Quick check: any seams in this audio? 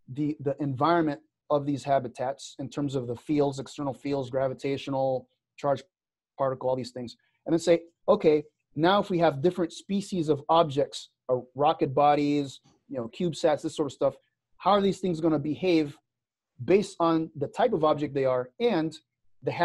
yes; 1 cut; at 1.4 s

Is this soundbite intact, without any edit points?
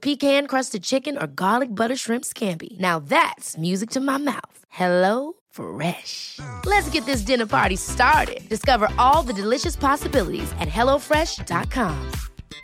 yes; 0 cuts

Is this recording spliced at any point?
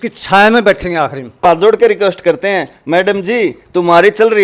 yes; 1 cut; at 1.4 s

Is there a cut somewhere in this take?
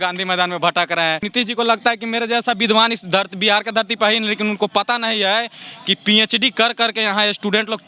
yes; 1 cut; at 1.3 s

